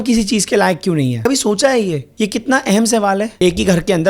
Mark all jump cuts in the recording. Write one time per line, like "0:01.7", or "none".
0:01.2
0:02.0
0:03.3